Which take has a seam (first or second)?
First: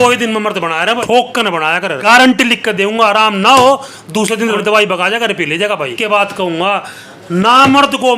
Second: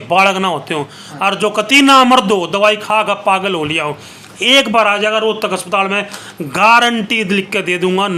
first